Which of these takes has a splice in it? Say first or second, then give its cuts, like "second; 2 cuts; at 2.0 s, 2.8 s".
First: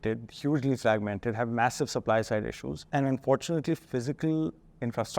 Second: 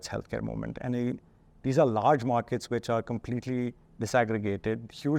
first; 1 cut; at 2.7 s